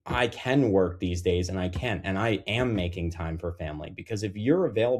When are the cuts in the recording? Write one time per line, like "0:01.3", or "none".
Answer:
none